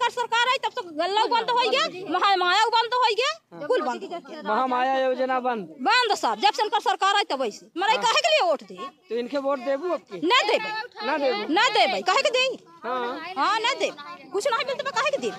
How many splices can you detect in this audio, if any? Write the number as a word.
zero